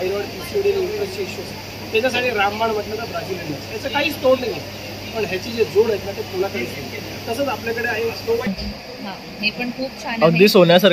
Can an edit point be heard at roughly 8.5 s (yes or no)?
yes